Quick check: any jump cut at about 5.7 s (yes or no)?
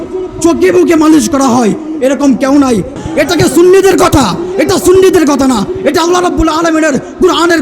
no